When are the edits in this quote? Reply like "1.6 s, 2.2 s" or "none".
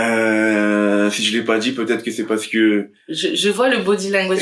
none